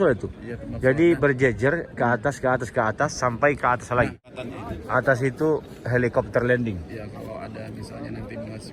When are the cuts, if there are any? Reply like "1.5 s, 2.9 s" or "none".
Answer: 4.2 s